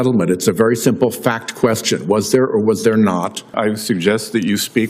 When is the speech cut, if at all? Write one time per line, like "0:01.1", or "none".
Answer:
0:03.5